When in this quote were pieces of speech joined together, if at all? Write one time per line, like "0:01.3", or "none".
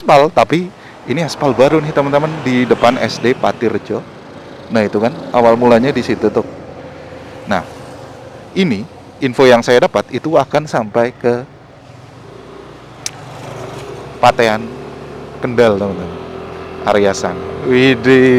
none